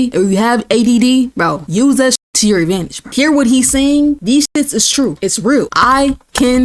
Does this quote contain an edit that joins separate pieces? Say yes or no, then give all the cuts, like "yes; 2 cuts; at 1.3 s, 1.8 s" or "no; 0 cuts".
yes; 3 cuts; at 2.0 s, 4.2 s, 5.6 s